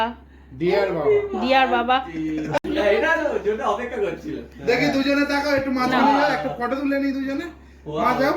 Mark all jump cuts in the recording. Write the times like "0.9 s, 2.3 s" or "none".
2.6 s